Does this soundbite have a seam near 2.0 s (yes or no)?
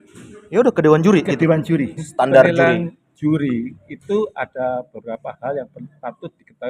yes